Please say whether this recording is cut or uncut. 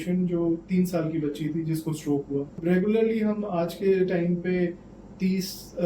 cut